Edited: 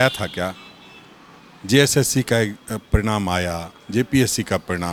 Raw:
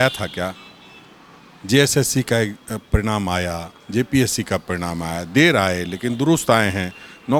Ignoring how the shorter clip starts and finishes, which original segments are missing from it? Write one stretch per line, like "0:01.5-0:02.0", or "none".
none